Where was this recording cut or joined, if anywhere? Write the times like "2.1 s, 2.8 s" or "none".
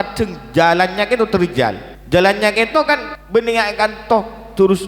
1.9 s, 3.1 s